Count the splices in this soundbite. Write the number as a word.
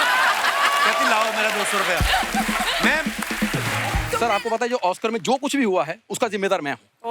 one